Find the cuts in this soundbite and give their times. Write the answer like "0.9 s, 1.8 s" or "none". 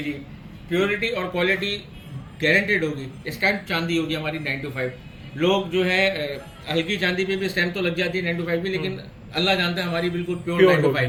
none